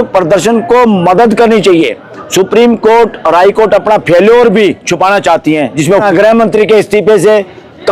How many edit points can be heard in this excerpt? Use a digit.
1